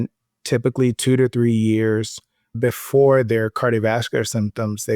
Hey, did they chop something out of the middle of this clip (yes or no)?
no